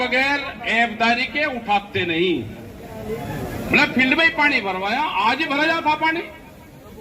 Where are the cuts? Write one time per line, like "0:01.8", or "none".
0:02.9